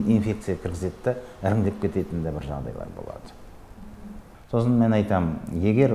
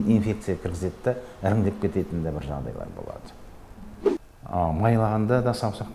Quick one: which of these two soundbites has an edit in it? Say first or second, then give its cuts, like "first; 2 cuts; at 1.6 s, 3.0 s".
second; 1 cut; at 4.1 s